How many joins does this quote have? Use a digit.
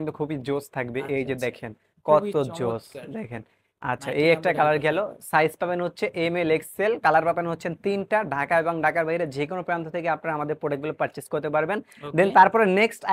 0